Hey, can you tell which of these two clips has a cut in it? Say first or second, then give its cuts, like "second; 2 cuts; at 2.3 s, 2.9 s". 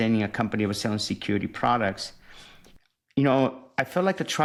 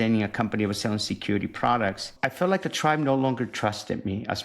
second; 1 cut; at 2.1 s